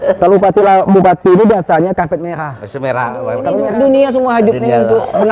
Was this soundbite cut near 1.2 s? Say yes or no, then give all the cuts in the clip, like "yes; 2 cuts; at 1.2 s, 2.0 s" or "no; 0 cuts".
no; 1 cut; at 3.3 s